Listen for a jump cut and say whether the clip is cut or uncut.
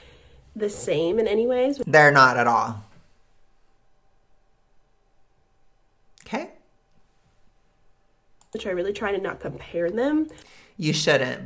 uncut